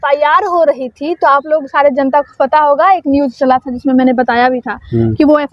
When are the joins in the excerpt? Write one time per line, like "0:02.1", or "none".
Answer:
none